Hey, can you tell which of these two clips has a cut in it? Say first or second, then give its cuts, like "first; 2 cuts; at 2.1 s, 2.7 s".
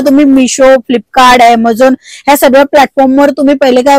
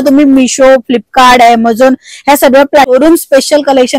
second; 1 cut; at 2.9 s